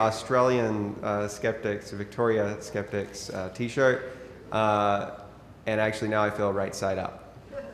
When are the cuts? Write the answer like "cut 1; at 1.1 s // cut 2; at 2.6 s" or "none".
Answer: cut 1; at 2.0 s